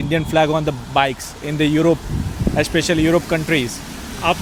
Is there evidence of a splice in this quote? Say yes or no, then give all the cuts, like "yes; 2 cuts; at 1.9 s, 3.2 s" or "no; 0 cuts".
no; 0 cuts